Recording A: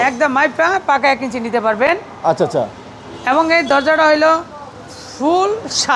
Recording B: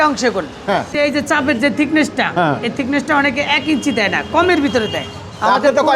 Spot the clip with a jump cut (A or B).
B